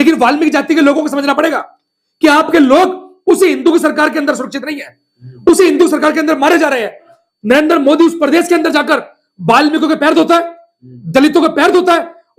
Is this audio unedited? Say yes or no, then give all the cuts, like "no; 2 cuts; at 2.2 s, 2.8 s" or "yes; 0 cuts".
no; 1 cut; at 7.1 s